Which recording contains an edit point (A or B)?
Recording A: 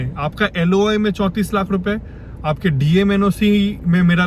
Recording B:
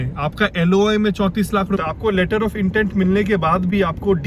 B